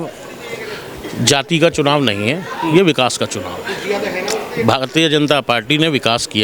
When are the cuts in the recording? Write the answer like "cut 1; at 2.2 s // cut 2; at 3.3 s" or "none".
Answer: none